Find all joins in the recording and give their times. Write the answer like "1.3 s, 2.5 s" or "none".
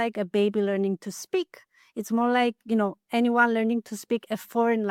none